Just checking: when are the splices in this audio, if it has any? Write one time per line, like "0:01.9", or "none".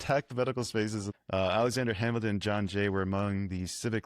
0:01.1